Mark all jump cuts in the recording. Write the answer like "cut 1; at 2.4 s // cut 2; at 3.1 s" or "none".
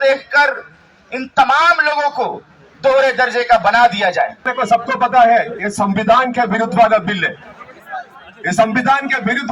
cut 1; at 4.5 s